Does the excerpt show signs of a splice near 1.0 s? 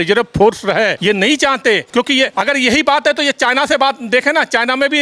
yes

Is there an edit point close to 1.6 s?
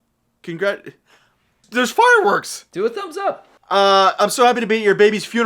yes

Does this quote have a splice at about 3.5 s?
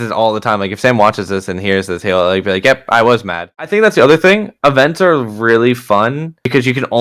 yes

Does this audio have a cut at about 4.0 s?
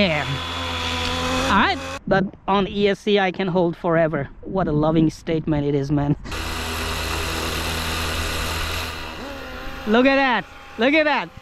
no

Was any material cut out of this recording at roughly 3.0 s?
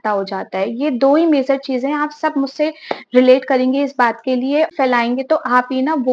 no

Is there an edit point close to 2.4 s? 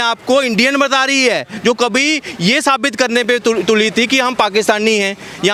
no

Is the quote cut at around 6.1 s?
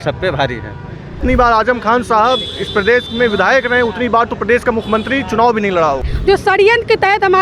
yes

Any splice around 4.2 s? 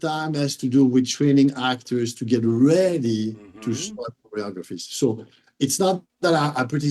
yes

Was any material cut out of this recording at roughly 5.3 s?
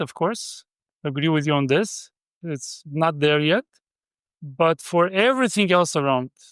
no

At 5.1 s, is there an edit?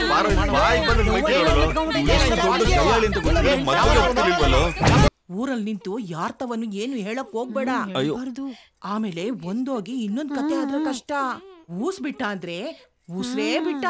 yes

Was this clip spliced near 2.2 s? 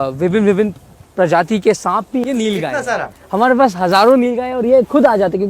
yes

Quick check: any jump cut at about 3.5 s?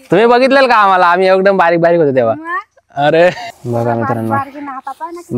yes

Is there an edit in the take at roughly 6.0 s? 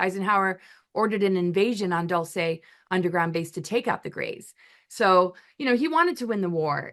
no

